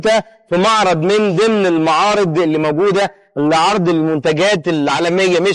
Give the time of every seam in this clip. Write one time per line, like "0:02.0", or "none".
none